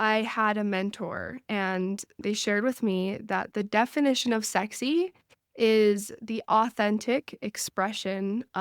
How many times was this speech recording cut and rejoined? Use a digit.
1